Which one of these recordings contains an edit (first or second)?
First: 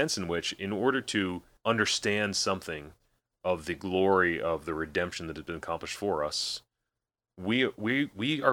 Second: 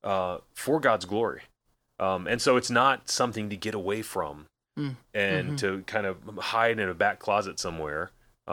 first